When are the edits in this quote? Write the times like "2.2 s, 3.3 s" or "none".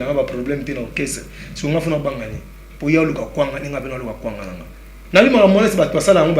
4.9 s